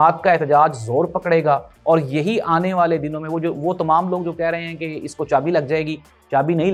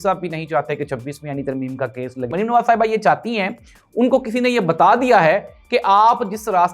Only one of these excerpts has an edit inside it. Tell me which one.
second; 1 cut; at 2.3 s

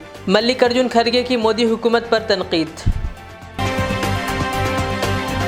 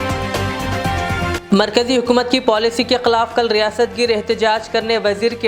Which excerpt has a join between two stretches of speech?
second; 1 cut; at 1.4 s

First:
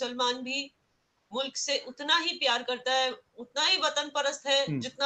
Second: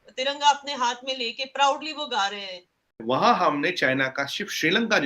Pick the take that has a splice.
second; 1 cut; at 2.9 s

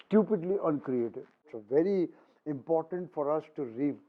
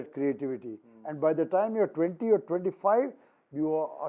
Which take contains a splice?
first; 1 cut; at 1.6 s

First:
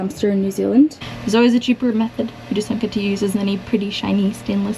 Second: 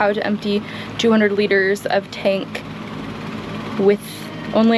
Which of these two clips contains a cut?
first; 1 cut; at 1.0 s

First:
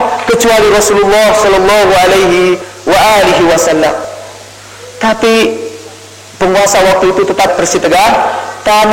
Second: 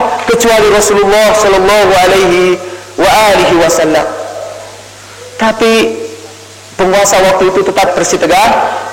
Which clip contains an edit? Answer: first; 2 cuts; at 2.7 s, 4.1 s

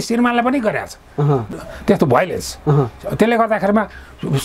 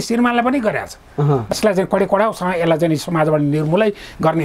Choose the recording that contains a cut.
second; 1 cut; at 1.6 s

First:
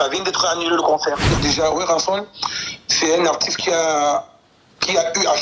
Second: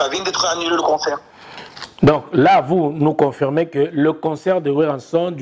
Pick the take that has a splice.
first; 1 cut; at 1.3 s

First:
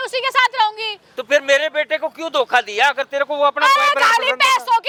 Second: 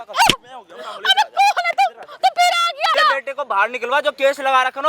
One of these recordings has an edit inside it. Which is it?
second; 1 cut; at 2.9 s

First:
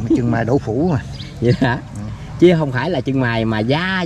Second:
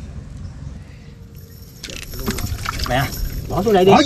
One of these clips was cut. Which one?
second; 1 cut; at 1.8 s

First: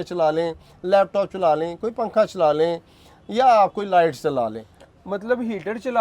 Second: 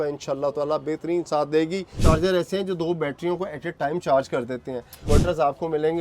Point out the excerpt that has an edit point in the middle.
second; 2 cuts; at 1.9 s, 5.0 s

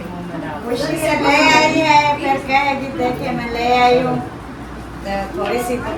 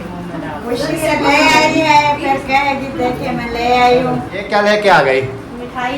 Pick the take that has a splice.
second; 1 cut; at 4.3 s

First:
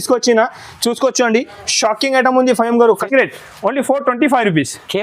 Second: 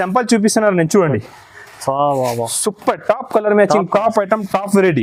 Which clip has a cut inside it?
first; 1 cut; at 3.0 s

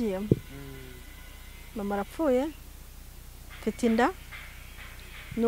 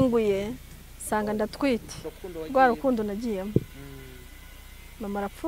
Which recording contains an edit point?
second; 1 cut; at 2.2 s

